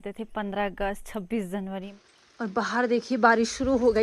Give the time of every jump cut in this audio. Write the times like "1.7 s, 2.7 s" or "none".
2.0 s